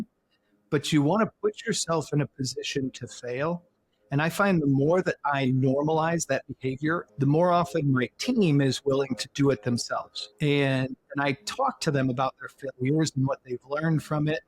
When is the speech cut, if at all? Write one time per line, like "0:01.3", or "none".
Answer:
0:07.1

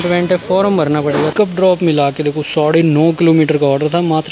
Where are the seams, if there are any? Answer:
0:01.3

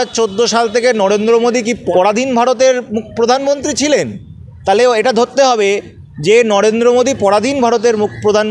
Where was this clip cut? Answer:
0:01.8

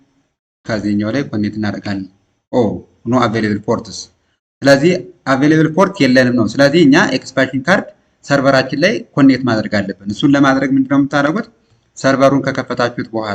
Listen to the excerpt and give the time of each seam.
none

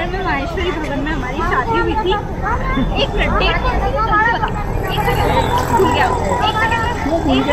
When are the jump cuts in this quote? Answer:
none

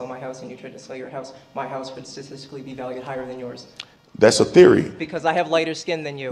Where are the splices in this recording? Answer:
none

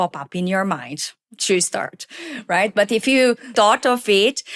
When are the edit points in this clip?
0:03.5

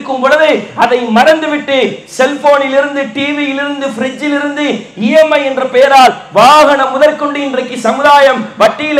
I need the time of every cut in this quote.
none

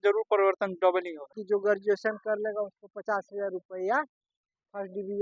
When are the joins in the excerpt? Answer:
0:01.3

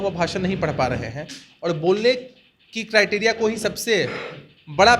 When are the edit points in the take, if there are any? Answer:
none

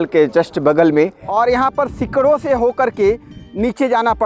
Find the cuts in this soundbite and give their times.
0:01.2

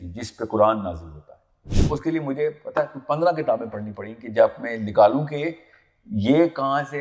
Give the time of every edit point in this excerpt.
0:01.7

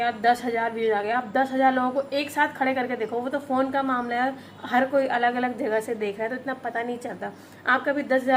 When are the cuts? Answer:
none

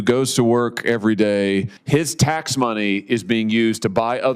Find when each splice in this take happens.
0:01.8

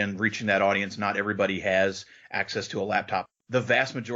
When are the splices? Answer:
0:03.2

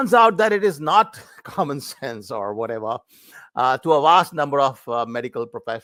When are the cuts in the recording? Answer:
none

